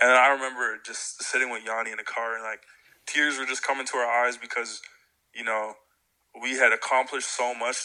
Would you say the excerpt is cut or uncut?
uncut